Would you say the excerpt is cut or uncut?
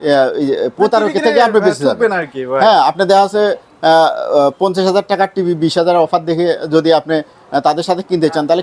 uncut